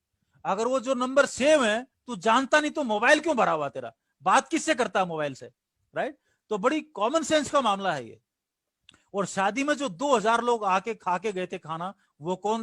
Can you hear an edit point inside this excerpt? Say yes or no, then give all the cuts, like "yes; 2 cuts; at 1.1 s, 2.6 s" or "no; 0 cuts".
no; 0 cuts